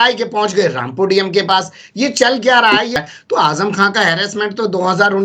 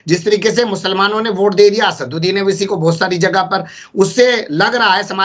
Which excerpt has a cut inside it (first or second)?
first